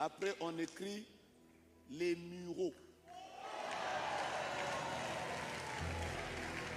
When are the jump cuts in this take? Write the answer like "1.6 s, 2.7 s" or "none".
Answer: none